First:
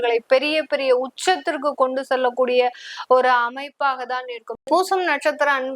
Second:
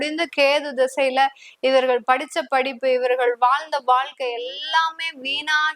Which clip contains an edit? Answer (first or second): first